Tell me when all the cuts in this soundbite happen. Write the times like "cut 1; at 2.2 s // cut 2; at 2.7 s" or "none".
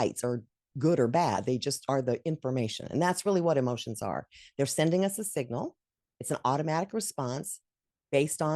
none